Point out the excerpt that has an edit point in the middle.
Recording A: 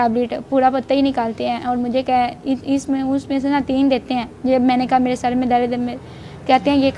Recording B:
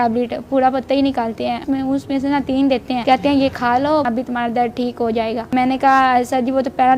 B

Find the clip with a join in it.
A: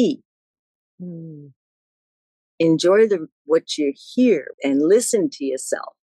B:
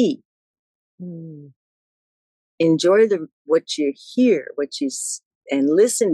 A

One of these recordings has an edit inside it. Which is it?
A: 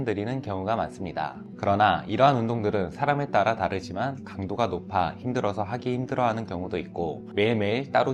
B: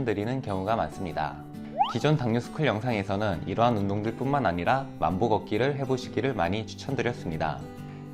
A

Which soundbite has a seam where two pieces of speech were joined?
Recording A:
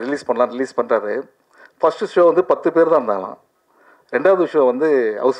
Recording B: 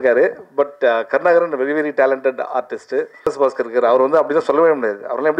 B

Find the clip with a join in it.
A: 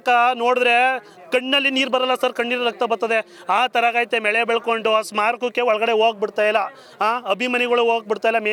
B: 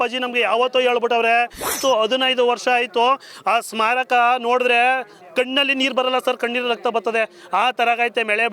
B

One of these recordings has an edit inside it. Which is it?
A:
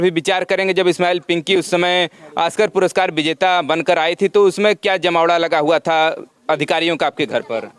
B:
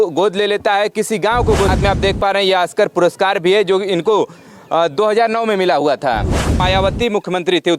B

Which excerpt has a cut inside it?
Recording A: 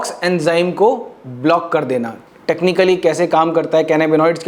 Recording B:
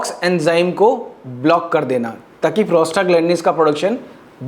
A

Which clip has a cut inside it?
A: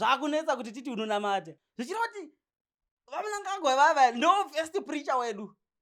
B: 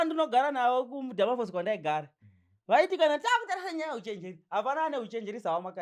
A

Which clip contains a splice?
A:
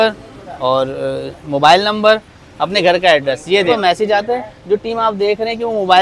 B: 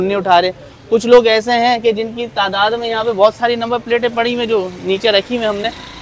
A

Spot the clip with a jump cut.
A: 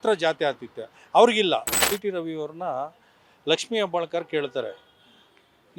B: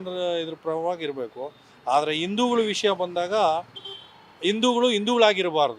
A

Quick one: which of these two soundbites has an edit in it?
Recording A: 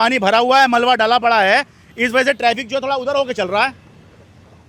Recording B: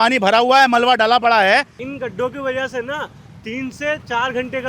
B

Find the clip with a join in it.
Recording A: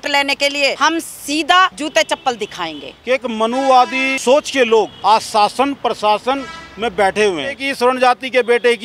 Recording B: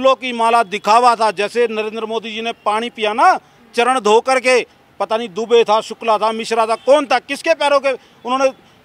A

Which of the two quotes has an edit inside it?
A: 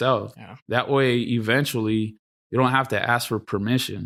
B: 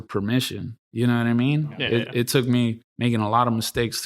B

